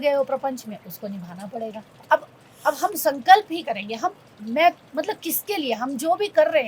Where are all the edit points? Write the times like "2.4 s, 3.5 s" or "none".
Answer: 1.9 s